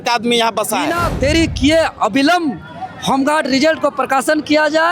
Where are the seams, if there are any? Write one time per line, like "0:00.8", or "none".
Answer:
0:01.0